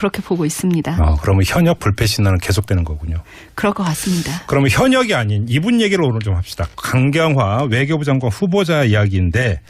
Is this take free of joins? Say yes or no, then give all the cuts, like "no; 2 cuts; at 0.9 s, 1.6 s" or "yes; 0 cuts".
no; 1 cut; at 4.9 s